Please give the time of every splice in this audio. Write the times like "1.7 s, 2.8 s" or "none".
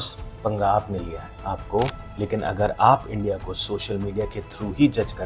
2.0 s